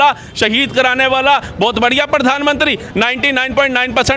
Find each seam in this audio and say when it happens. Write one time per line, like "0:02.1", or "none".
none